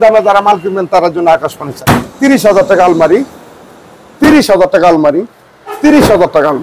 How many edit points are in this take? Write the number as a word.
one